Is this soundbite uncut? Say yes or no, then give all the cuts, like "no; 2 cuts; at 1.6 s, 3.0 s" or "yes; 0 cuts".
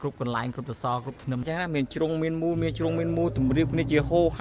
no; 1 cut; at 1.5 s